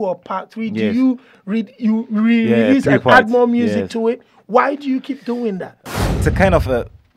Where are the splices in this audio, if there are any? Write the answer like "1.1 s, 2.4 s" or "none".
5.7 s